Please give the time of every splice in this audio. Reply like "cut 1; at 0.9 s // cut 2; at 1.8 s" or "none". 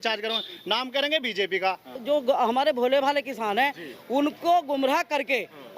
cut 1; at 2.0 s

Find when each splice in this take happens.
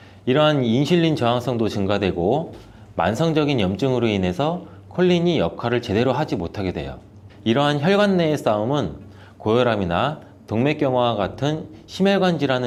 none

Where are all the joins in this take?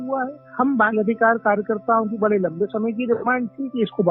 none

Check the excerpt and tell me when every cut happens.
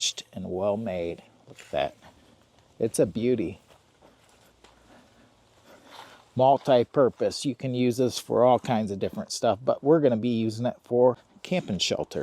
cut 1; at 11.3 s

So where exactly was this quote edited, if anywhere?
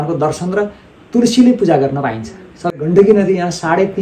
cut 1; at 2.7 s

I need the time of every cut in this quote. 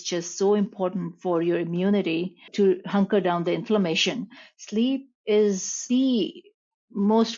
cut 1; at 2.4 s // cut 2; at 5.8 s

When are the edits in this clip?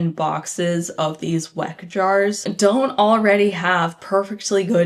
none

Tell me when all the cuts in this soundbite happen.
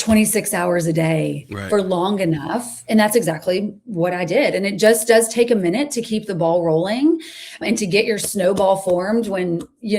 cut 1; at 7.6 s

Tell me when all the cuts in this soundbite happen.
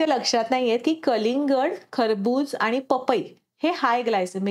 none

